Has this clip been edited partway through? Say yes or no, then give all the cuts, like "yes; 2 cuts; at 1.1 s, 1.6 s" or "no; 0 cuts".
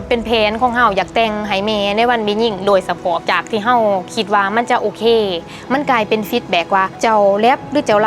yes; 2 cuts; at 3.2 s, 6.9 s